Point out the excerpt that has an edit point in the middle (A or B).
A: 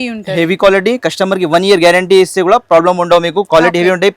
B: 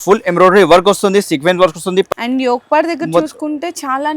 B